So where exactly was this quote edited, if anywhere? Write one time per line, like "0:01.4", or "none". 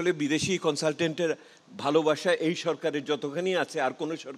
none